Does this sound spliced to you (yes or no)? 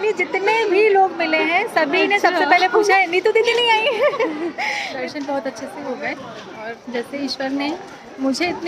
yes